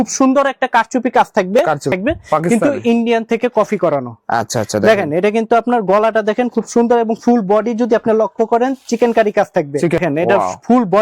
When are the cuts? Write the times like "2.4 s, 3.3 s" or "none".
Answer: 1.9 s, 10.0 s